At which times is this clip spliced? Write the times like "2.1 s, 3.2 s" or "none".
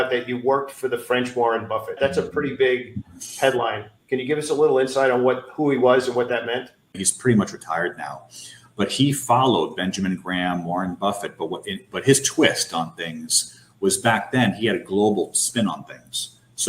2.0 s, 6.8 s